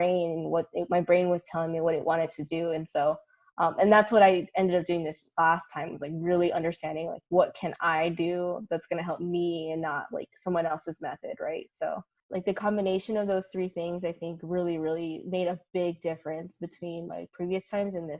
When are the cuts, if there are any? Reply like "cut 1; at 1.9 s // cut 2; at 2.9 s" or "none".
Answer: cut 1; at 12.2 s